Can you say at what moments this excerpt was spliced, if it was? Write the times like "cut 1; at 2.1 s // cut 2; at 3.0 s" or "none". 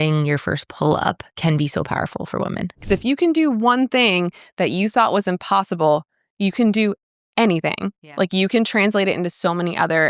cut 1; at 1.3 s // cut 2; at 2.8 s